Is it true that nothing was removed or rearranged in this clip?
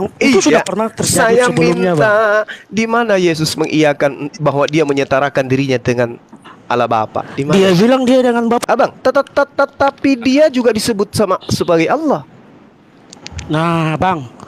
no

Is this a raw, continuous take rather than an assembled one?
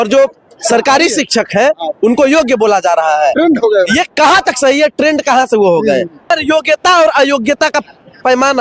no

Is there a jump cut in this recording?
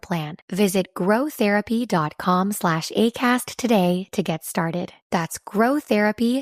no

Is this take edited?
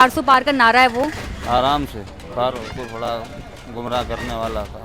yes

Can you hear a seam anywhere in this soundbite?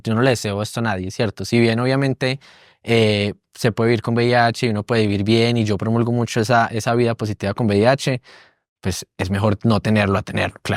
no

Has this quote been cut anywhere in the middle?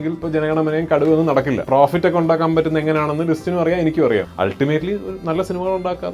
yes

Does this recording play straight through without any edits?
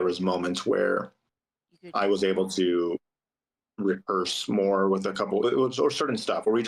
yes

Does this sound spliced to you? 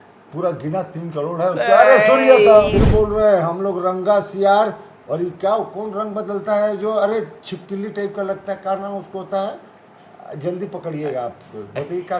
yes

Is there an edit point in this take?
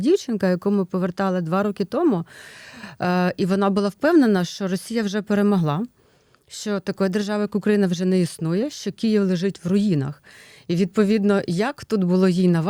no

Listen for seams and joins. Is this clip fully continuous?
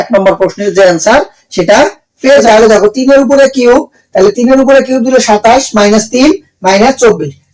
no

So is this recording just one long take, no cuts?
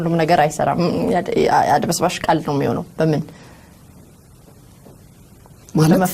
yes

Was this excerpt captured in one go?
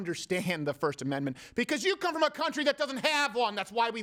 yes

